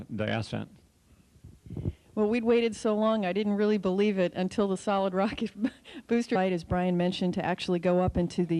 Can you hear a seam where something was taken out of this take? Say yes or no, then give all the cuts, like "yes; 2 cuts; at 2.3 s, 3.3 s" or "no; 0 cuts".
no; 0 cuts